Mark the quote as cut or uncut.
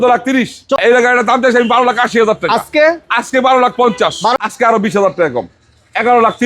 cut